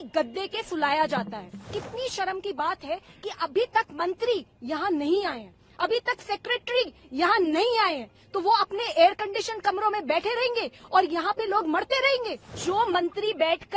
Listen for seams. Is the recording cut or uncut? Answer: cut